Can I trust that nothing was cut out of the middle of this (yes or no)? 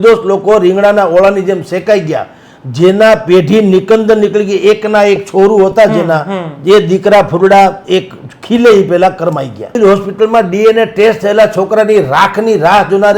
no